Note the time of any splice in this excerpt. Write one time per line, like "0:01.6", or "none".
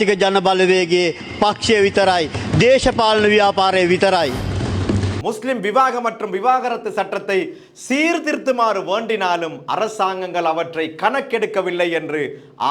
0:05.2